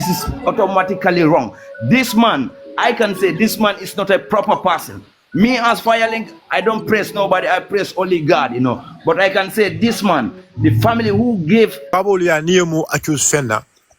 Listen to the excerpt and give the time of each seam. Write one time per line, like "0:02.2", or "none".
0:11.9